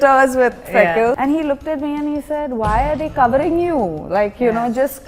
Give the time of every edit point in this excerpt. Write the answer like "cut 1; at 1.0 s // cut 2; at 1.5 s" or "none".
cut 1; at 1.2 s